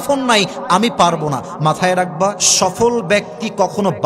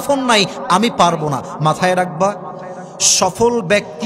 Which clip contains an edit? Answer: first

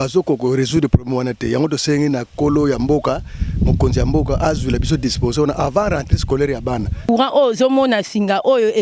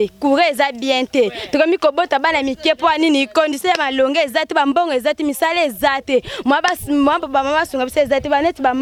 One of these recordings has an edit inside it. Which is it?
first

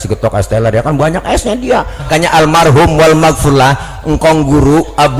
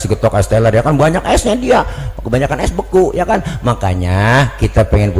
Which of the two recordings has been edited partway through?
first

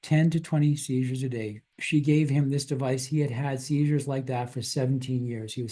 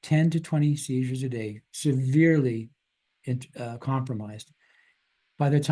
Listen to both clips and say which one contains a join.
first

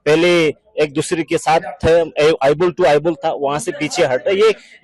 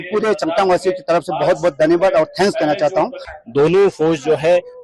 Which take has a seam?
second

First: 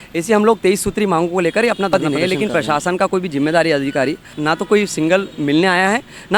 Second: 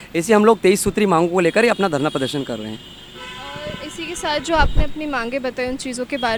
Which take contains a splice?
first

